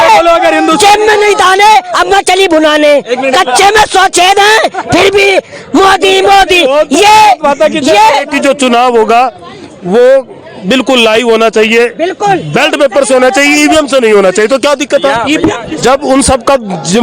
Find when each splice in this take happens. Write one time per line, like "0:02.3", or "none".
0:08.3
0:15.7